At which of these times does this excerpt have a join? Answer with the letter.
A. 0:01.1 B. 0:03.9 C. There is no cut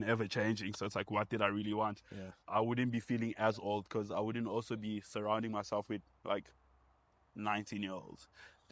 C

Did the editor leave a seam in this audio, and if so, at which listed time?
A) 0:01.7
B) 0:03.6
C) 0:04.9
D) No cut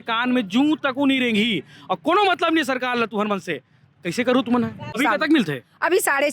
C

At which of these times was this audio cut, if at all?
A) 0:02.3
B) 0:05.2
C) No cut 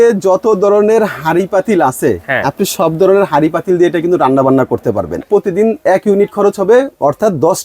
B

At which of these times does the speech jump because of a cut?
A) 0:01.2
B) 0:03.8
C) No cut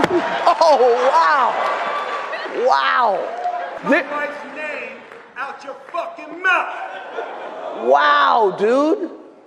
B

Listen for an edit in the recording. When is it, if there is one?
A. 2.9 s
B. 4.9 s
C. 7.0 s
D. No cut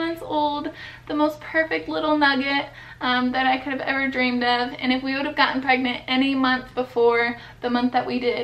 D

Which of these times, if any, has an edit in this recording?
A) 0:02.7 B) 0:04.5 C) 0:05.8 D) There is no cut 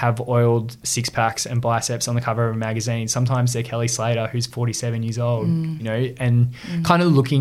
C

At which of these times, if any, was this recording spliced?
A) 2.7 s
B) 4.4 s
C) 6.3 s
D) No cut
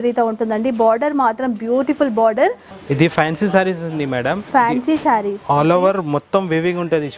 A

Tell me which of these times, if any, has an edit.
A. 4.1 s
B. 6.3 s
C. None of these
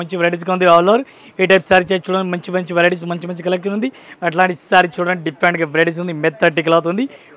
A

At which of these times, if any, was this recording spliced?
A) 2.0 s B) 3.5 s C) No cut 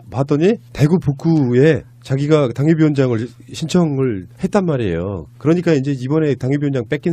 B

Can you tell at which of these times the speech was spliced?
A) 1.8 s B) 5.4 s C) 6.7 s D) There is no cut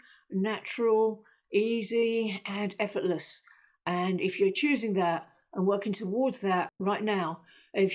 C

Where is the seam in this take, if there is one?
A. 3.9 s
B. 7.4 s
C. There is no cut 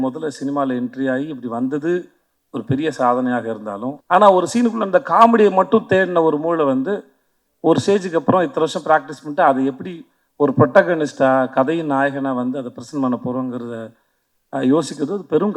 A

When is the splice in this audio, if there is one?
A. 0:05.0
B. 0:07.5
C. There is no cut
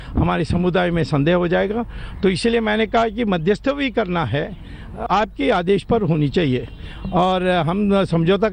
A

